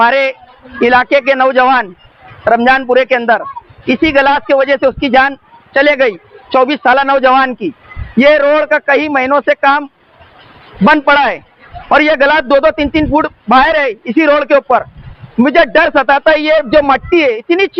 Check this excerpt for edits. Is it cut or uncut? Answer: uncut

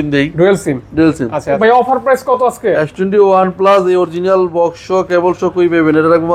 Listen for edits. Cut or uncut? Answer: cut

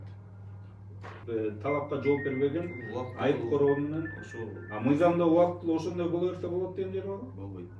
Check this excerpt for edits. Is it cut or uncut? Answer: cut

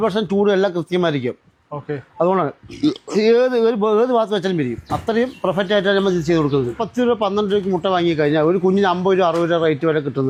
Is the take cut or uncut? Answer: uncut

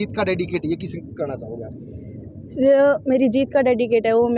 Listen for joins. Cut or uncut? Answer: uncut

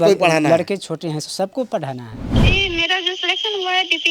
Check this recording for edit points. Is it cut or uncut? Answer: cut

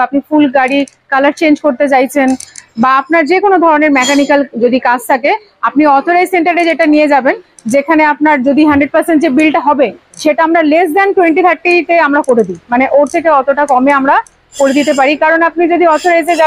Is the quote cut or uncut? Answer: uncut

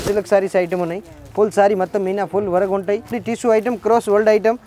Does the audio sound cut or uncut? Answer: cut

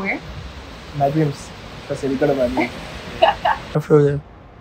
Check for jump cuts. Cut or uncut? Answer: cut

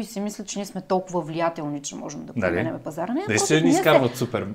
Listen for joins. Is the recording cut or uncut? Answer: uncut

